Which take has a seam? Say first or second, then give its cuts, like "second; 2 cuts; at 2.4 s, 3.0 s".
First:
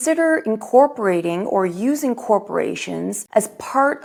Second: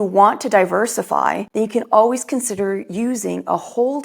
second; 1 cut; at 1.4 s